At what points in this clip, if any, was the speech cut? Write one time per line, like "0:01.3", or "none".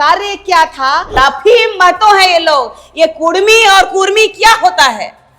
0:01.2